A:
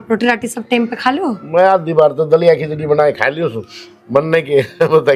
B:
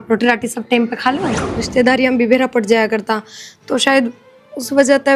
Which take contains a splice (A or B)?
B